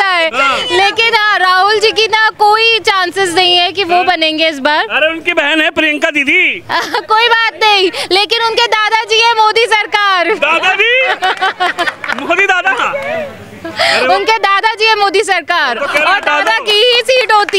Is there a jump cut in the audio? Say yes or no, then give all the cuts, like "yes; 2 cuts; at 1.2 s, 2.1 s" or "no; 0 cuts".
no; 0 cuts